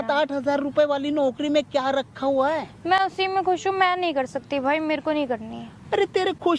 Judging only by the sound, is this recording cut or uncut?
uncut